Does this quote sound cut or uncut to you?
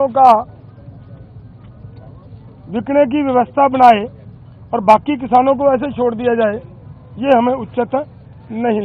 uncut